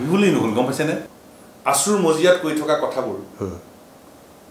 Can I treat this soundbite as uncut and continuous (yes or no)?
no